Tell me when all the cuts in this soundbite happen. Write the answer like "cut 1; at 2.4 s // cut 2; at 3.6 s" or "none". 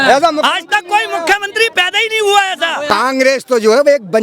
cut 1; at 2.9 s

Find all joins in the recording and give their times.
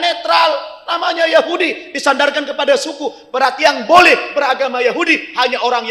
none

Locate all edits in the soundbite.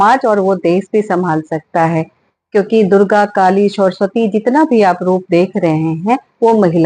none

